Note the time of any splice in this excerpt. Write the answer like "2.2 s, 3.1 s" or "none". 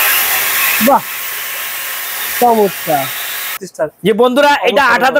4.1 s